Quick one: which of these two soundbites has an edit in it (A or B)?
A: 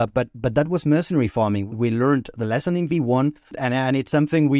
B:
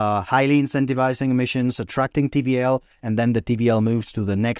A